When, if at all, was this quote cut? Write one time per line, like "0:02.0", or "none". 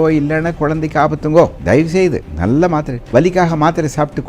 0:02.0
0:03.0